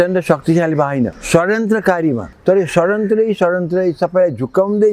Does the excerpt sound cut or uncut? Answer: cut